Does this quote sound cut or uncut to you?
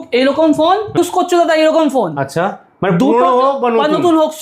cut